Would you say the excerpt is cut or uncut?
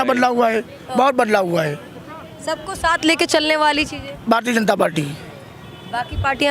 uncut